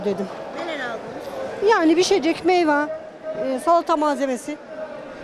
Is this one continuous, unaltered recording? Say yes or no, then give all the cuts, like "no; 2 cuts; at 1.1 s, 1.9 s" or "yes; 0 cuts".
yes; 0 cuts